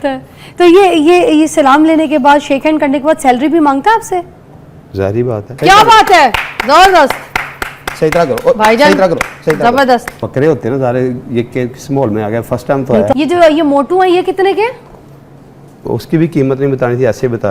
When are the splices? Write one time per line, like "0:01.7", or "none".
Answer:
0:05.6
0:10.1
0:13.1